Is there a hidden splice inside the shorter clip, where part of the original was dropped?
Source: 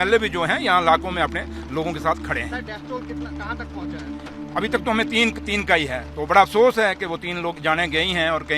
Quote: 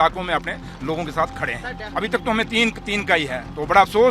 yes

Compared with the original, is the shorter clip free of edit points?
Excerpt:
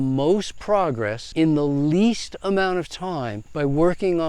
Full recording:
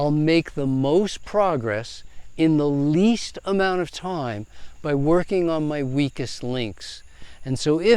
no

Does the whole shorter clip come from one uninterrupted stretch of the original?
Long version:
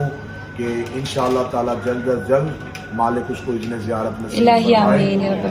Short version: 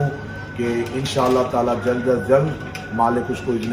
yes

